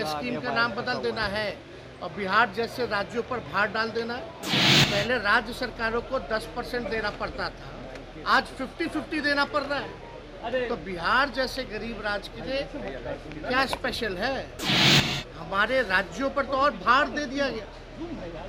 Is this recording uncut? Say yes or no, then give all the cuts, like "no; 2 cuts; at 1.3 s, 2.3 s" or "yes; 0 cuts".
no; 1 cut; at 4.6 s